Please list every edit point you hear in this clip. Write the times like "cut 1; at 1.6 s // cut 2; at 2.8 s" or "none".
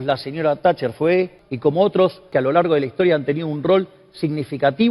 cut 1; at 1.4 s // cut 2; at 2.3 s